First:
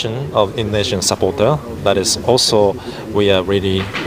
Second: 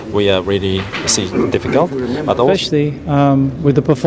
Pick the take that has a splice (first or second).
second